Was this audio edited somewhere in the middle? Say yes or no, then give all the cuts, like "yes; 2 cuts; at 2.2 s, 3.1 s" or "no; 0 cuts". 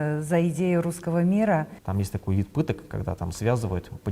yes; 1 cut; at 1.8 s